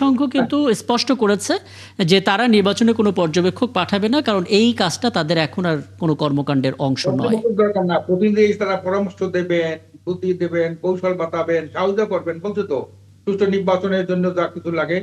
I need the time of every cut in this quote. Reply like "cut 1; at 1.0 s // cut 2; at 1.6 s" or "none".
none